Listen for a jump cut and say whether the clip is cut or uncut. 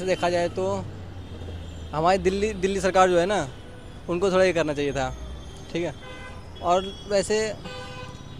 uncut